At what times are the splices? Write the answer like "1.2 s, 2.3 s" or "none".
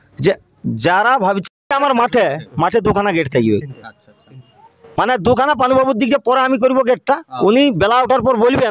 1.6 s